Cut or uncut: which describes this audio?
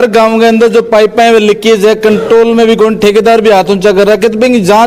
uncut